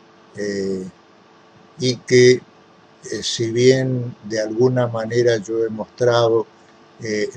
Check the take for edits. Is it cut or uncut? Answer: uncut